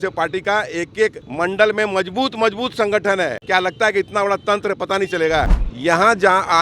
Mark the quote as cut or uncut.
cut